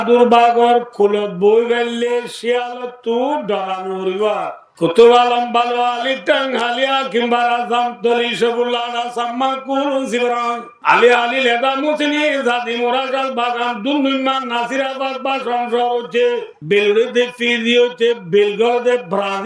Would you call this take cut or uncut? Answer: cut